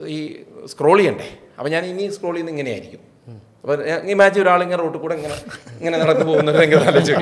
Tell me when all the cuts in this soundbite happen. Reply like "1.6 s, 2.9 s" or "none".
none